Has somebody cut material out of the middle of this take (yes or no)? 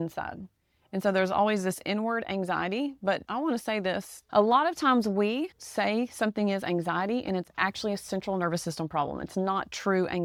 no